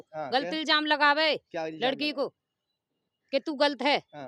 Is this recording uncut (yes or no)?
yes